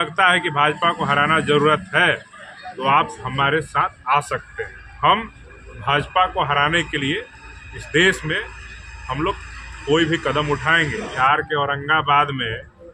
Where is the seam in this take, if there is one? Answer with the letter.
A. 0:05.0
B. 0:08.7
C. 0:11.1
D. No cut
C